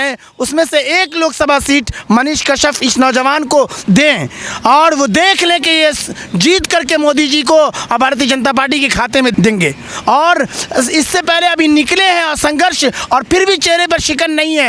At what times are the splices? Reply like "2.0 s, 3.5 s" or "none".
none